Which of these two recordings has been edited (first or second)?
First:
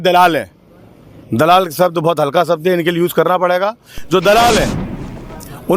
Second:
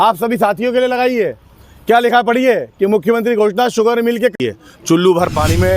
second